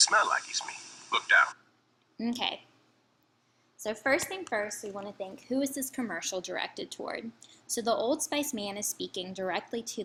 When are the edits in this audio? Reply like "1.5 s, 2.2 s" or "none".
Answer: none